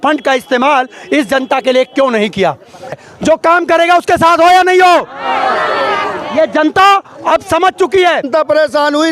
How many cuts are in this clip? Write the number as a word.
two